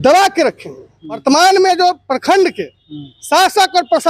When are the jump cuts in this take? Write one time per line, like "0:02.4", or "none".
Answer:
0:01.2